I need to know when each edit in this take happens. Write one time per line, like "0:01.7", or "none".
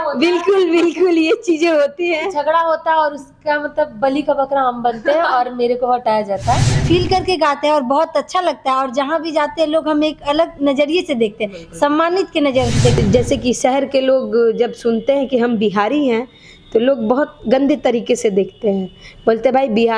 0:06.8
0:13.0